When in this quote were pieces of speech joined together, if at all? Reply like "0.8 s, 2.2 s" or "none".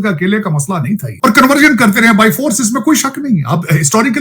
1.1 s